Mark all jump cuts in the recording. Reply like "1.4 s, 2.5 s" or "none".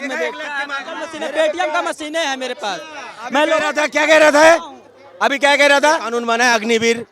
1.0 s, 6.1 s